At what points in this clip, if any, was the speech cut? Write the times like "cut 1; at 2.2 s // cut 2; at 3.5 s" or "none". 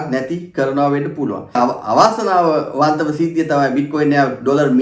cut 1; at 1.6 s